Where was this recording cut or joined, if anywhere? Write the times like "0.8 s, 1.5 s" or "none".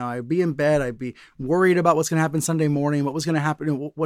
none